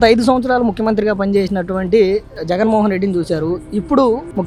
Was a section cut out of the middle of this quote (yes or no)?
no